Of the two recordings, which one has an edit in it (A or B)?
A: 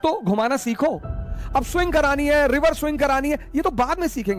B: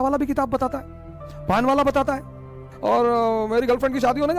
B